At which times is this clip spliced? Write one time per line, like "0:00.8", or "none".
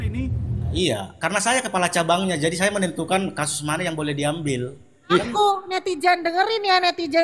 0:00.7
0:05.1